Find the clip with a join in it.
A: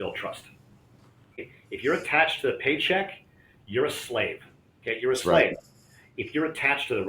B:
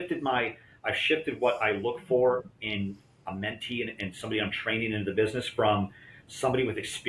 A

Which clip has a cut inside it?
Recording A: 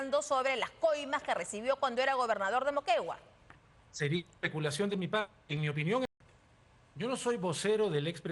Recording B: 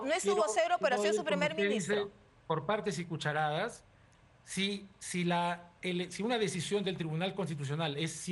A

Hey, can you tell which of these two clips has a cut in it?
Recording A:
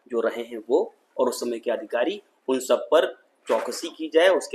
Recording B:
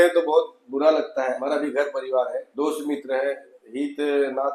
B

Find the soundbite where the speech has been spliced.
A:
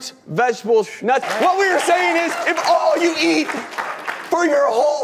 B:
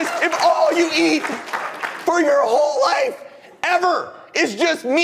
A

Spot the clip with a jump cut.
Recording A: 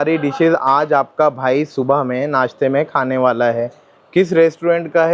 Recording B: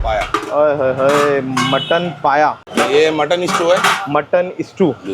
B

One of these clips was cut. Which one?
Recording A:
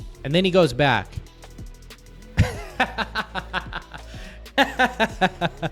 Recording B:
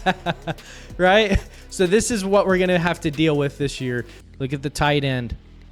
B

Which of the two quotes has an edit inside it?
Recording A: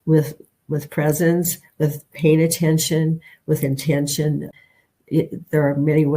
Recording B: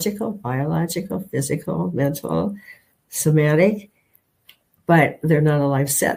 A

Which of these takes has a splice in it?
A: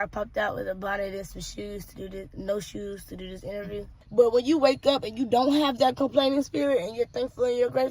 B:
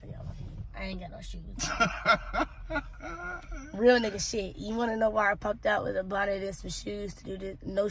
A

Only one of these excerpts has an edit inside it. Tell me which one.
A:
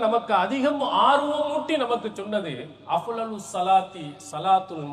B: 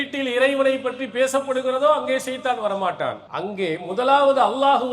B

